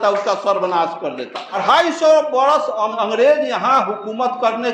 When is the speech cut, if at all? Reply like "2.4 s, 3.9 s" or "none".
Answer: 1.6 s, 2.9 s